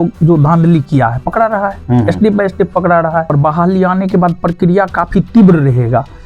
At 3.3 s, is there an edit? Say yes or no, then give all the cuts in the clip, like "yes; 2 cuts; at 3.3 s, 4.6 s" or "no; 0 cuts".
yes; 1 cut; at 3.3 s